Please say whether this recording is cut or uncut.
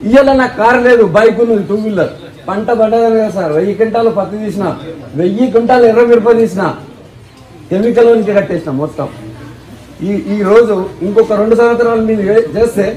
uncut